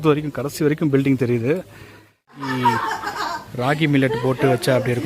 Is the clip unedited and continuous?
no; 1 cut; at 2.5 s

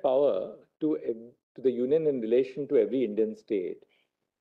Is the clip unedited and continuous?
yes; 0 cuts

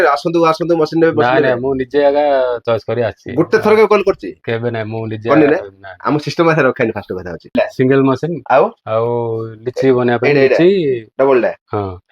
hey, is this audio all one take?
no; 1 cut; at 7.5 s

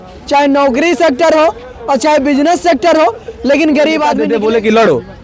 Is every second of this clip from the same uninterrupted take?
no; 1 cut; at 4.2 s

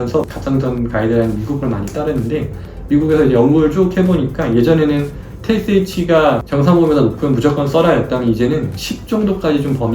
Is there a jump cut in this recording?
no; 0 cuts

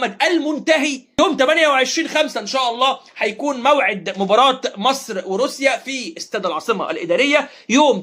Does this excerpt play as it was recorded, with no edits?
yes; 0 cuts

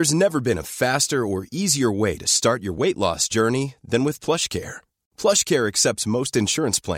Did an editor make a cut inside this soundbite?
no; 0 cuts

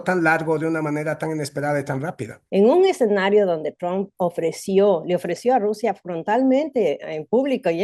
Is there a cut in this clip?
yes; 1 cut; at 2.3 s

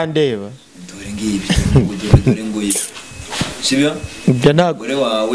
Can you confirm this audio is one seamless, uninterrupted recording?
yes; 0 cuts

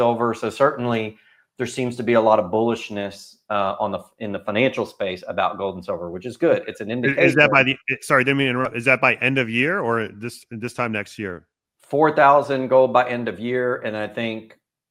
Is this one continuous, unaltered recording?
yes; 0 cuts

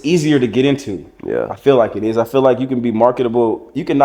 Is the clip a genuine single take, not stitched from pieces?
yes; 0 cuts

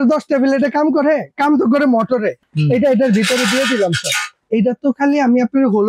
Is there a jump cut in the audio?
yes; 2 cuts; at 2.4 s, 4.4 s

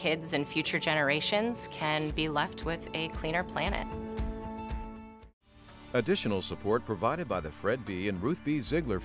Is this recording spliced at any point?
yes; 1 cut; at 5.7 s

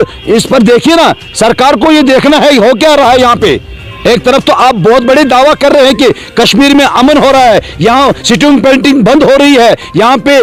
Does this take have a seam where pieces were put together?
no; 0 cuts

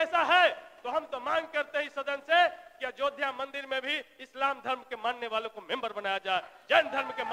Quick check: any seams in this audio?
no; 0 cuts

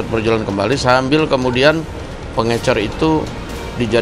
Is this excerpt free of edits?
yes; 0 cuts

